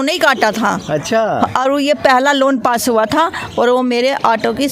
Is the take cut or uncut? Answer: uncut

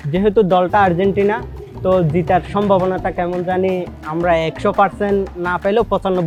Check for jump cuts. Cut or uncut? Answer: uncut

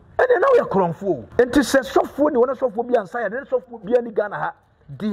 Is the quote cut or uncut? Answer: cut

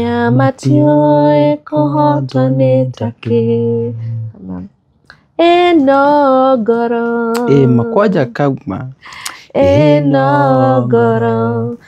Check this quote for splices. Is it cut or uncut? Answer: uncut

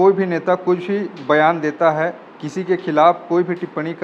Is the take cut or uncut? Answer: uncut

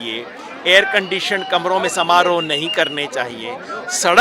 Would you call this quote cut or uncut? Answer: uncut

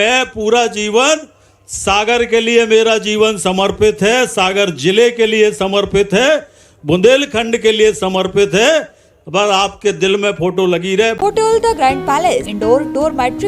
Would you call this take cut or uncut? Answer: cut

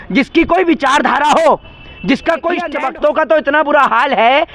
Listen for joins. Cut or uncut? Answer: cut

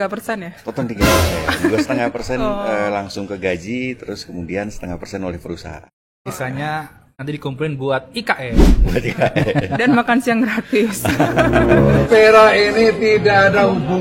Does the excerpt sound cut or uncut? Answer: cut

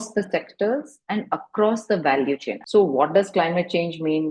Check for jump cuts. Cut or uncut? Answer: cut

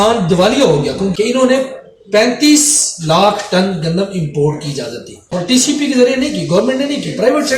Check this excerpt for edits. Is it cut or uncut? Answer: cut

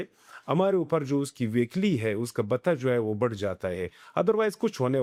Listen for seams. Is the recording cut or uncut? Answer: uncut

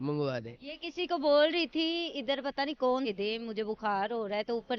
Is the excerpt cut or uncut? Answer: cut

